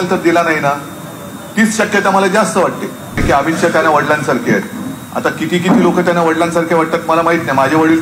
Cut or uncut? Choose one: cut